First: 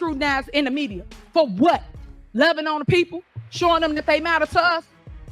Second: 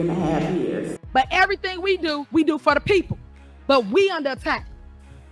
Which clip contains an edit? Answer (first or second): second